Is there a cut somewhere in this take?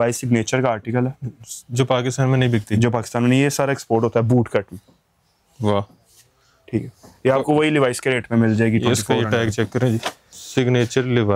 no; 0 cuts

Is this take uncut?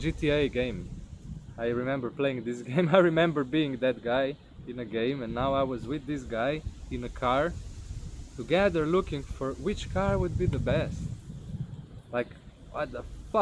yes; 0 cuts

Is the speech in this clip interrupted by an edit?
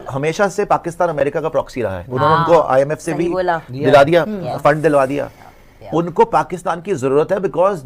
no; 0 cuts

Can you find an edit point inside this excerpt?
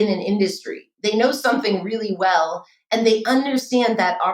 yes; 1 cut; at 0.9 s

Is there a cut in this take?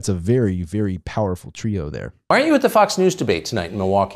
yes; 1 cut; at 2.2 s

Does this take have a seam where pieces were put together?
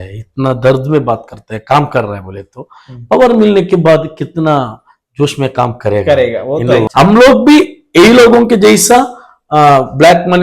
yes; 1 cut; at 6.9 s

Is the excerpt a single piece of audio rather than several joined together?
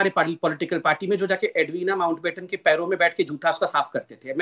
yes; 0 cuts

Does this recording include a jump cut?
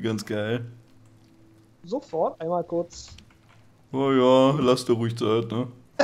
no; 0 cuts

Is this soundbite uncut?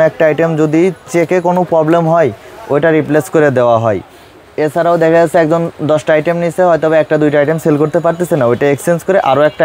yes; 0 cuts

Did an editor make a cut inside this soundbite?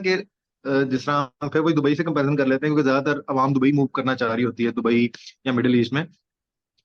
no; 0 cuts

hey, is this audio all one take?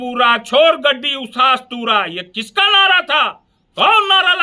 yes; 0 cuts

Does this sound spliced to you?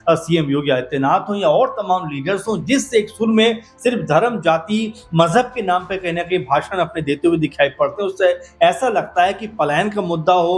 no; 0 cuts

